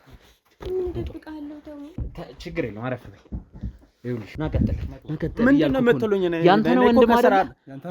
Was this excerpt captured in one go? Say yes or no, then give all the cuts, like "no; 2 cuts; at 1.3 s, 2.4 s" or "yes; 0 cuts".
no; 1 cut; at 4.3 s